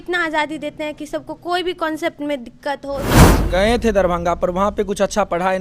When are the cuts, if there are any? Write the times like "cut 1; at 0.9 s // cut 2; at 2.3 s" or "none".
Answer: cut 1; at 3.3 s